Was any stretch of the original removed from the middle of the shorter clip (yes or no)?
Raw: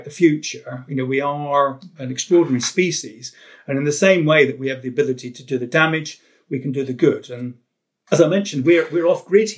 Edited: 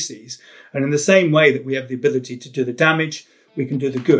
no